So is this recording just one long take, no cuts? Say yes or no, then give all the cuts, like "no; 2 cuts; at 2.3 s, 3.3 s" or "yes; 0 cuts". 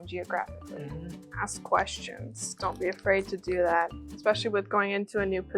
no; 2 cuts; at 1.2 s, 4.0 s